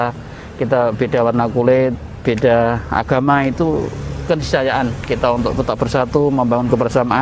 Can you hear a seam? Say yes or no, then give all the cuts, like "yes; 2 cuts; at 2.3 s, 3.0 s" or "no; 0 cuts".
no; 0 cuts